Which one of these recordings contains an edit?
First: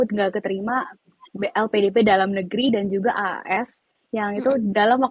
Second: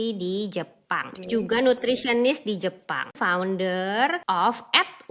second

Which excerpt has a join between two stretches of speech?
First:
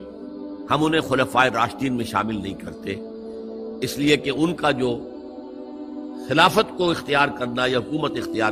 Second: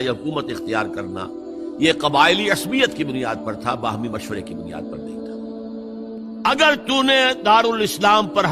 second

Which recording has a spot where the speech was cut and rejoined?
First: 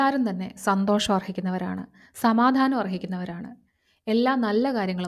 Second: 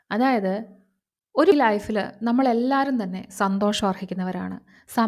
second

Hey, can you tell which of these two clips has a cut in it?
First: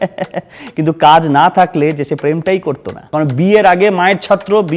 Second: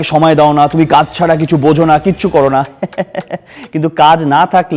first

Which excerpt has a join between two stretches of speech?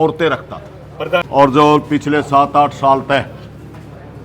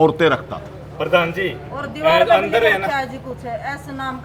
first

